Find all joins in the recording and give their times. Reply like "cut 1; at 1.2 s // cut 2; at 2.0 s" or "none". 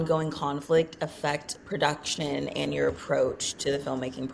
none